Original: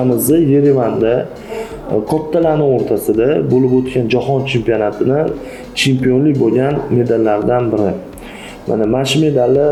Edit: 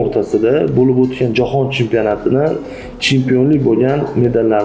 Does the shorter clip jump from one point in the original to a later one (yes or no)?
no